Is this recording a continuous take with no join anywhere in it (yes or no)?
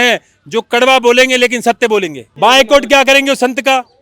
no